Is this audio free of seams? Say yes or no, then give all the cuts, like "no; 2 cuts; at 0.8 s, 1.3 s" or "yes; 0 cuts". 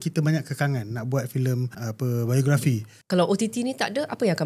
no; 2 cuts; at 1.8 s, 2.9 s